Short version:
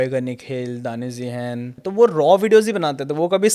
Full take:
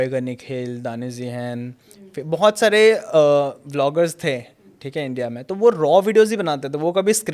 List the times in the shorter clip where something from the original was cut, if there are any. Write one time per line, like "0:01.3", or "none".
0:01.8

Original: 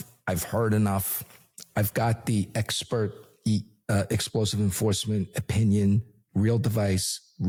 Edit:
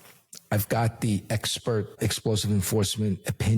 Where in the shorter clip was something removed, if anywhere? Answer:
0:02.0

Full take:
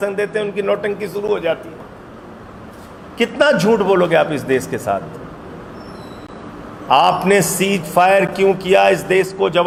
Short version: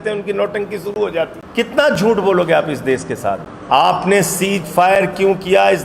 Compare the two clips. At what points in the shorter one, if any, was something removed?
0:01.4
0:03.5

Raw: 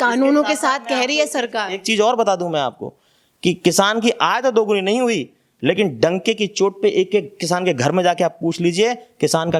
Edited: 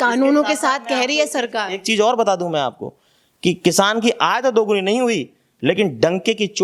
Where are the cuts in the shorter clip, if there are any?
none

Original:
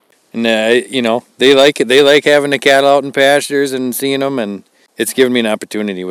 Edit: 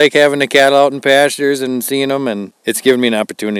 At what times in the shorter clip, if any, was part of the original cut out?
0:02.5

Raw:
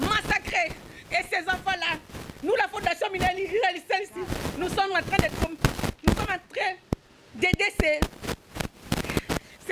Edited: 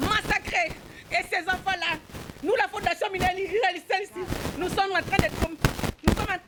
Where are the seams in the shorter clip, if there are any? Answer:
none

